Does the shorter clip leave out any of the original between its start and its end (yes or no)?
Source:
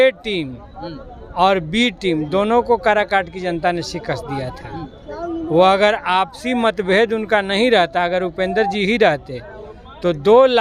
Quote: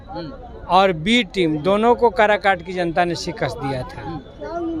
no